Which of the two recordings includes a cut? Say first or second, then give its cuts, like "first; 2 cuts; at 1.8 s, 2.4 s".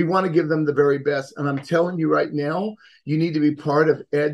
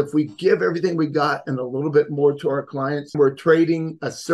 second; 1 cut; at 3.1 s